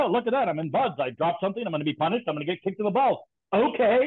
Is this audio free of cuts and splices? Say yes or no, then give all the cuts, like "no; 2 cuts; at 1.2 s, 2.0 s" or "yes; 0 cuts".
yes; 0 cuts